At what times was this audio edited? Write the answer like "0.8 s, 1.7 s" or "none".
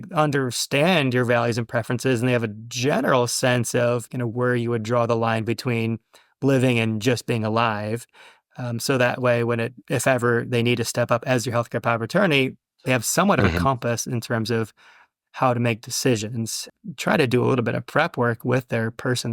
16.6 s